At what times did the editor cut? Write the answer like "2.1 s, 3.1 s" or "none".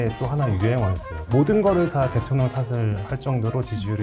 none